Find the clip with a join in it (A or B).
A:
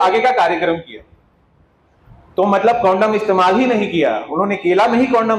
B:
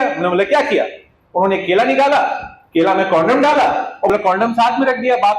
B